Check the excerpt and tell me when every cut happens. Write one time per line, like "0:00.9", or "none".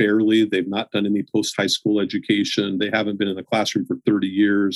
none